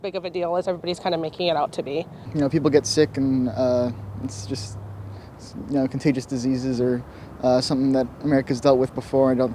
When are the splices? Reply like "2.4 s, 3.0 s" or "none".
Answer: 2.3 s